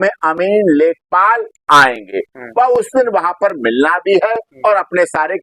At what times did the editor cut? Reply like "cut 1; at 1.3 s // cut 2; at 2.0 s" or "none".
none